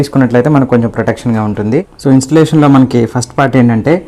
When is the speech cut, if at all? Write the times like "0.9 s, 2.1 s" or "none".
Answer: 1.9 s